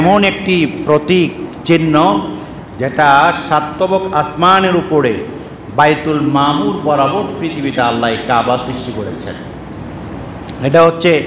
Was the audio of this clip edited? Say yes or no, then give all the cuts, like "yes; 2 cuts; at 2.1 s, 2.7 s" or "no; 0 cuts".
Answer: no; 0 cuts